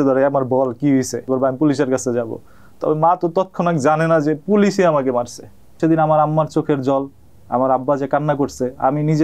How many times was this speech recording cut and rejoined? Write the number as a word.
two